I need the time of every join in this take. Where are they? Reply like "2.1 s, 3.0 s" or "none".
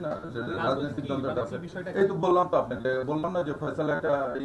none